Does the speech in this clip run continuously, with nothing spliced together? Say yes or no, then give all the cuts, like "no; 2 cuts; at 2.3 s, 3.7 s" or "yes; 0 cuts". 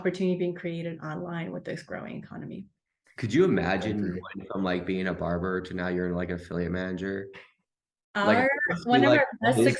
yes; 0 cuts